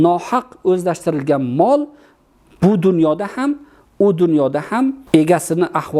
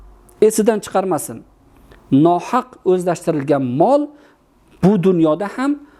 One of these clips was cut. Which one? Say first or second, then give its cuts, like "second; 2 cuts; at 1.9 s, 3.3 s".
first; 1 cut; at 5.0 s